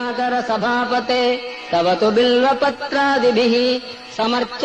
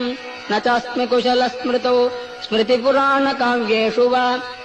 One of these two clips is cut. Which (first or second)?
first